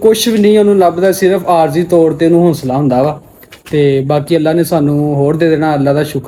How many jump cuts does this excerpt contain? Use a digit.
0